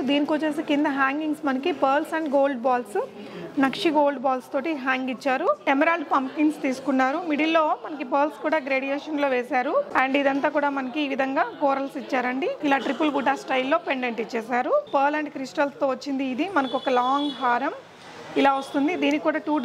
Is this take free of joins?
no; 4 cuts; at 5.6 s, 9.9 s, 12.6 s, 14.9 s

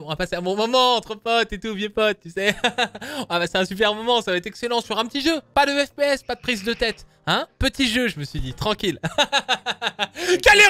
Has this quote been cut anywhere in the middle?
no; 0 cuts

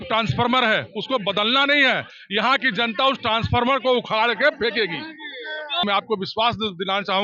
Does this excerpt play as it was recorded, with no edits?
no; 1 cut; at 5.8 s

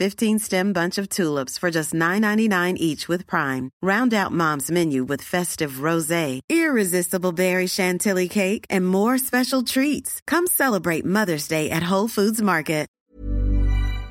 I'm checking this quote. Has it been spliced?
yes; 1 cut; at 13.0 s

